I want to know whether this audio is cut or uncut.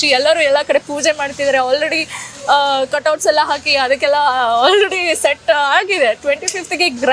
uncut